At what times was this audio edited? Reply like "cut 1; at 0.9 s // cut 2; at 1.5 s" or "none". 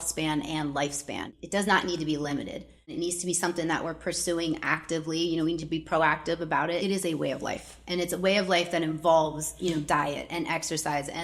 cut 1; at 1.3 s // cut 2; at 2.9 s // cut 3; at 6.8 s